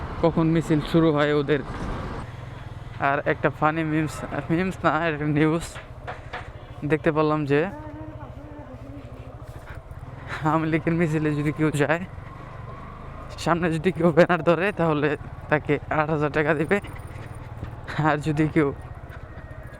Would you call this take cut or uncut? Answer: cut